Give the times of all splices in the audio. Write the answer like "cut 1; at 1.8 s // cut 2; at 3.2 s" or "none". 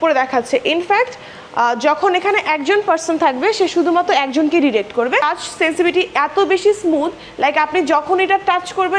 cut 1; at 5.2 s